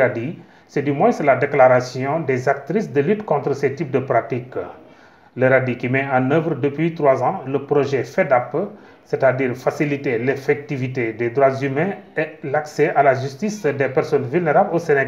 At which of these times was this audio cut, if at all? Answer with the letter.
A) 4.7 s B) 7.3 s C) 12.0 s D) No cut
A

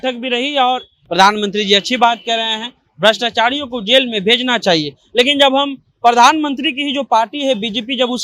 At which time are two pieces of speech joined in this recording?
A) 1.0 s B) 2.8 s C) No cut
A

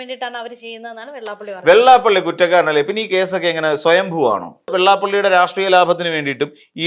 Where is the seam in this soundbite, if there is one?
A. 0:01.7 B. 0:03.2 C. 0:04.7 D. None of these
C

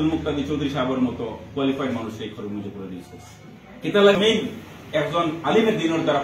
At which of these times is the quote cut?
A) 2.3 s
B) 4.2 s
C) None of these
B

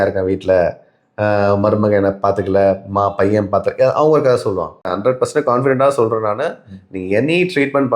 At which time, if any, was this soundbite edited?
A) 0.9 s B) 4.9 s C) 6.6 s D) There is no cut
B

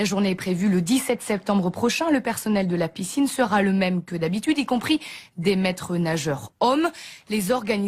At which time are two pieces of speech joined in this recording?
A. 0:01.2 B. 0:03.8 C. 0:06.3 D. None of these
A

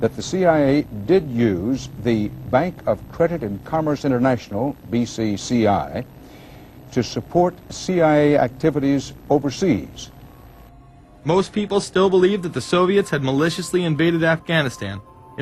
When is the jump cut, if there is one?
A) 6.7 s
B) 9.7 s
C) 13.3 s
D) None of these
A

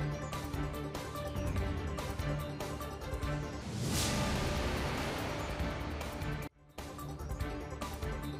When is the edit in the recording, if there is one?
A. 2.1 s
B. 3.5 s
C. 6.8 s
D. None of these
B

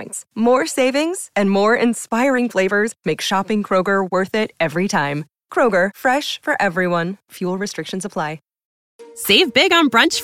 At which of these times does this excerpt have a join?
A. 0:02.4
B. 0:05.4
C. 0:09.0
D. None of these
D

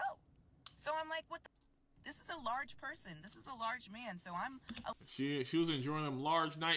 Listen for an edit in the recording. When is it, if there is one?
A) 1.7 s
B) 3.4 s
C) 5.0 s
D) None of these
C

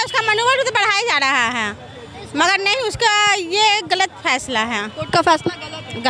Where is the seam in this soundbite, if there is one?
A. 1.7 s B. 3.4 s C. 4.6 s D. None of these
D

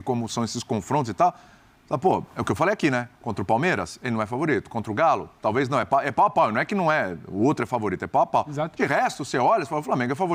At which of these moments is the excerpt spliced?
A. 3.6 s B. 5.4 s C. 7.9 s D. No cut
D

